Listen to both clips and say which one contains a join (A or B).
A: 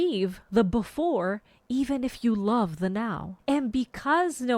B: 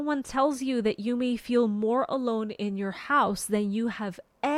A